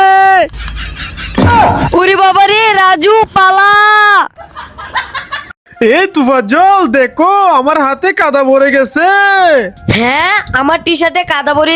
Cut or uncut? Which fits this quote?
cut